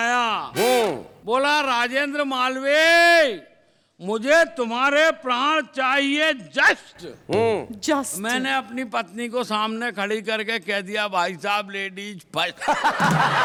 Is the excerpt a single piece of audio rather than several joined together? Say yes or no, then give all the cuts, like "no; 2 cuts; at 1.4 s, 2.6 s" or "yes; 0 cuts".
yes; 0 cuts